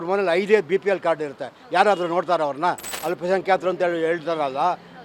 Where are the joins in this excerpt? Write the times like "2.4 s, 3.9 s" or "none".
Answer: 2.9 s